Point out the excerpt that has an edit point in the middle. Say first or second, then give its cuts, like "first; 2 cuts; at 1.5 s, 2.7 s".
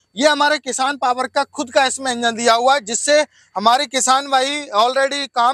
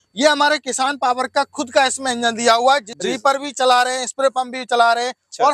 second; 1 cut; at 2.9 s